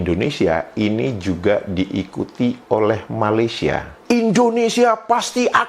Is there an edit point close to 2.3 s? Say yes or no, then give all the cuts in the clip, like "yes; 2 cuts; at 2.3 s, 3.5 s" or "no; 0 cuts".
no; 1 cut; at 4.0 s